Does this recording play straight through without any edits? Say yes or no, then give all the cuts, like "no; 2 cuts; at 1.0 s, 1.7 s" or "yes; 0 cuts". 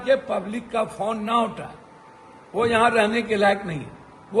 yes; 0 cuts